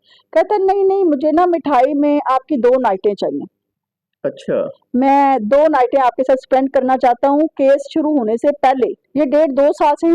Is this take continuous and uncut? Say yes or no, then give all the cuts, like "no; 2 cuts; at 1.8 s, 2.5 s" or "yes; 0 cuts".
no; 1 cut; at 9.0 s